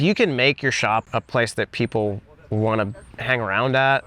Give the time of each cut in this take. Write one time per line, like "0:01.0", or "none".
0:01.1
0:03.1